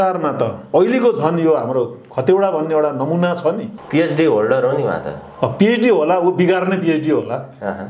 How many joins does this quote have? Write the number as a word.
one